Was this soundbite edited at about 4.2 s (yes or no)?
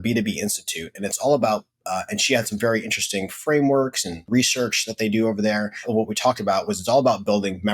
yes